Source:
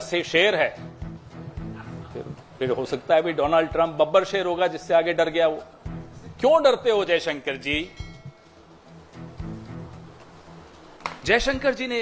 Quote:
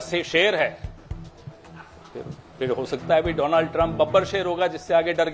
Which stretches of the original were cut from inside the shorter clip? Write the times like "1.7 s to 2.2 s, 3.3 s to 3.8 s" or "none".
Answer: none